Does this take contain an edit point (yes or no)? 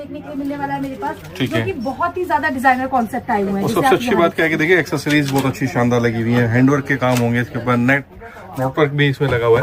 no